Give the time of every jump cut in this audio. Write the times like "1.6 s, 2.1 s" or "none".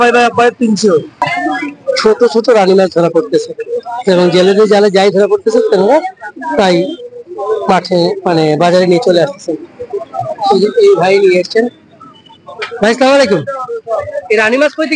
1.3 s